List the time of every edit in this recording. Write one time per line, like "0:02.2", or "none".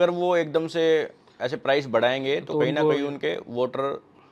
none